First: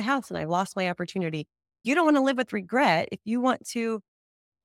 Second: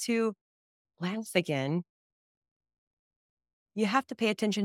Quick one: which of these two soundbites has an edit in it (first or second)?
first